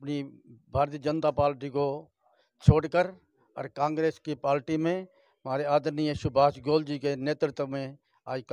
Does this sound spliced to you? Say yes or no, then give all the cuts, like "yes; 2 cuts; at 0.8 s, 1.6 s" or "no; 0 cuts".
no; 0 cuts